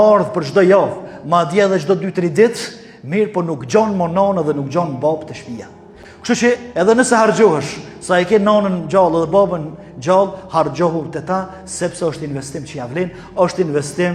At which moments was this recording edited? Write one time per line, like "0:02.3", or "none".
none